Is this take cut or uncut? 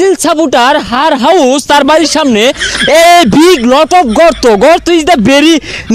uncut